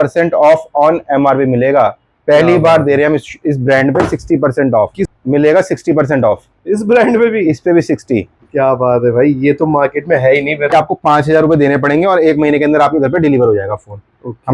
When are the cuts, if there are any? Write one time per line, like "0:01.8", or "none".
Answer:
0:05.0
0:10.7